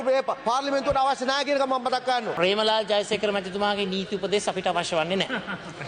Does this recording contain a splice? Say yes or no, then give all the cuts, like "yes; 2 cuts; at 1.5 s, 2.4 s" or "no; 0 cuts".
yes; 1 cut; at 2.3 s